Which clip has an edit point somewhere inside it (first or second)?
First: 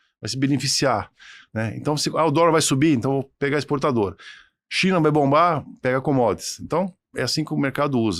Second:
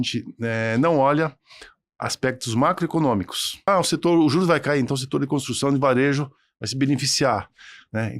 second